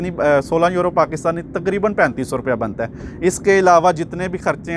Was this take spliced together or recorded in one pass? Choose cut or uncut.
uncut